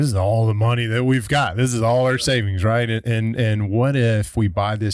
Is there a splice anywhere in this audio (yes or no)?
no